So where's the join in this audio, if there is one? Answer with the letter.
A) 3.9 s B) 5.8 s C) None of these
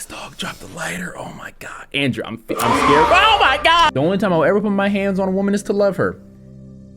A